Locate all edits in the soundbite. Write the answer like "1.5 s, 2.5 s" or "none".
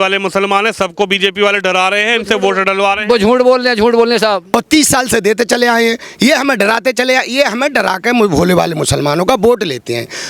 4.4 s